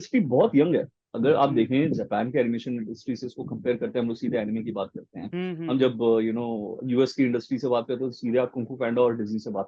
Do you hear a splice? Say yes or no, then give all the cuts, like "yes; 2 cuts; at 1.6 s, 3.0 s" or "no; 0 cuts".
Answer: no; 0 cuts